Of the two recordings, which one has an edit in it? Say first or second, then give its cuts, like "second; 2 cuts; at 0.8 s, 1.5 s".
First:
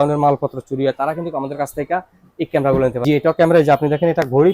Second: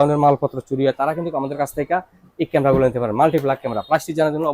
first; 1 cut; at 3.0 s